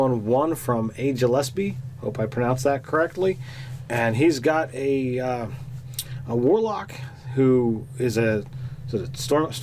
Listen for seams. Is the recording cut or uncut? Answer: uncut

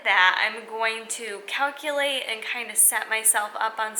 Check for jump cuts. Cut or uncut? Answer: uncut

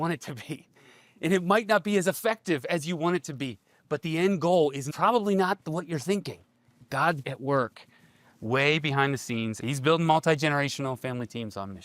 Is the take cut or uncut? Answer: cut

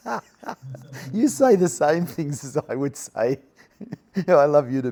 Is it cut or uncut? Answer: uncut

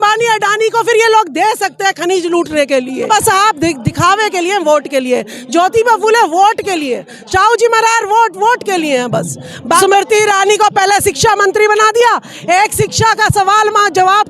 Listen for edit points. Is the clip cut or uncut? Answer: cut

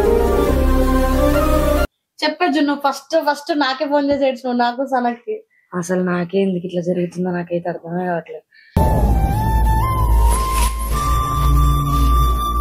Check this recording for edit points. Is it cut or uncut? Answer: cut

